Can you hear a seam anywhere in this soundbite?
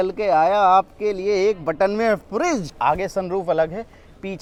no; 0 cuts

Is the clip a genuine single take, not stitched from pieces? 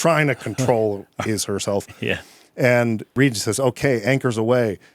no; 1 cut; at 3.1 s

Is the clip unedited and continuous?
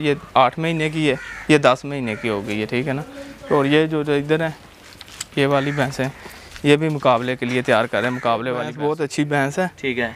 no; 1 cut; at 8.7 s

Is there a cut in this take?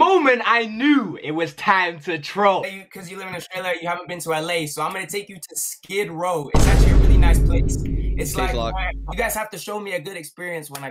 yes; 2 cuts; at 2.6 s, 9.1 s

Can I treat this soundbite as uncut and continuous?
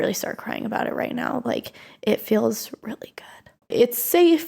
no; 1 cut; at 3.6 s

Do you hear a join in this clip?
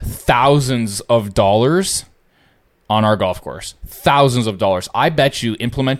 no; 0 cuts

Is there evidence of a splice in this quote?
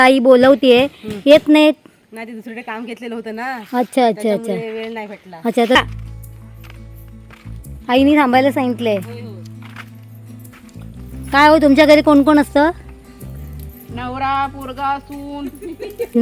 yes; 1 cut; at 5.8 s

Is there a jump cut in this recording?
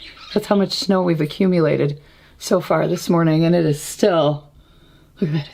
no; 0 cuts

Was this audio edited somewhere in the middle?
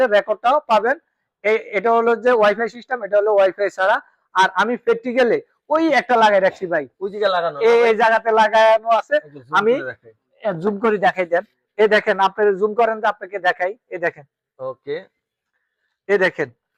no; 0 cuts

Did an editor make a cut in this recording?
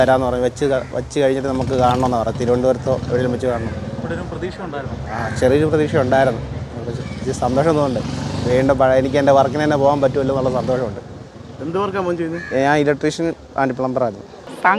no; 0 cuts

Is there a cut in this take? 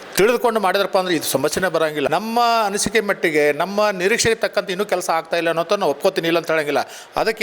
yes; 1 cut; at 2.1 s

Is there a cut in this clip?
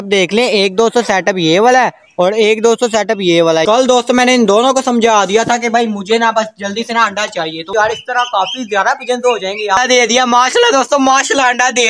yes; 3 cuts; at 3.6 s, 7.7 s, 9.8 s

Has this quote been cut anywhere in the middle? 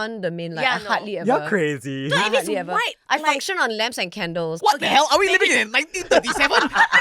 yes; 1 cut; at 4.6 s

